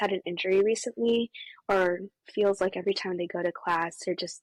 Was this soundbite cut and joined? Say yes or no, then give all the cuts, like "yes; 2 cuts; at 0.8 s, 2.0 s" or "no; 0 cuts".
no; 0 cuts